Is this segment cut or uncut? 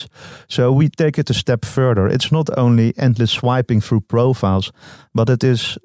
uncut